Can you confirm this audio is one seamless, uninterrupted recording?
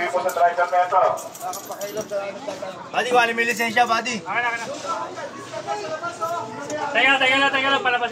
yes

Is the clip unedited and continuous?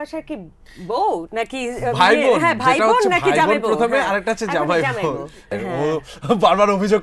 no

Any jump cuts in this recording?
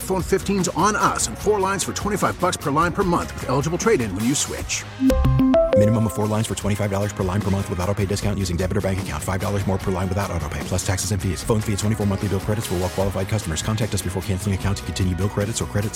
no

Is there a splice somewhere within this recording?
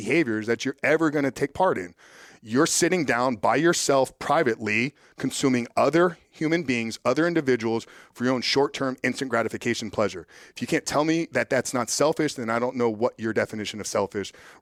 no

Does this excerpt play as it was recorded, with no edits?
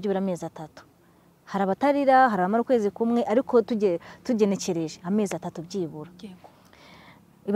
yes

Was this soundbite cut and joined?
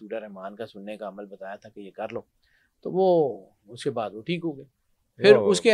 no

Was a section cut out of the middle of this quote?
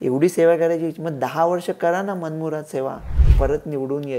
yes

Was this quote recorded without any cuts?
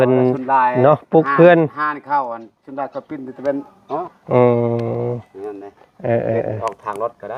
yes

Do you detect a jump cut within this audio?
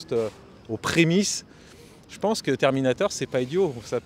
no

